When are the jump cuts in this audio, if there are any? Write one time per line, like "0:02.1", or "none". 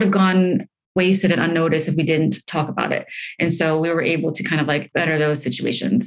0:00.9
0:04.9